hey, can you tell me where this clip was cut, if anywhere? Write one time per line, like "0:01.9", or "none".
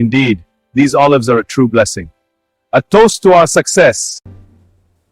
0:04.2